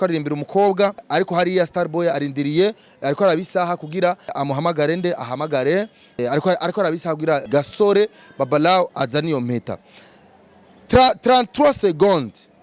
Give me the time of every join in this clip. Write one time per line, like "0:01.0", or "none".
0:01.0
0:04.4
0:06.2
0:07.4